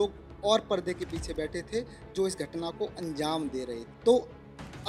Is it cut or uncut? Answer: cut